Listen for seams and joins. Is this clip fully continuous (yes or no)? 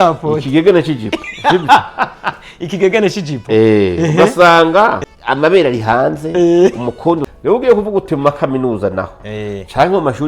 no